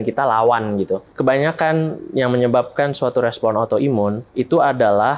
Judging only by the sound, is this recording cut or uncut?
cut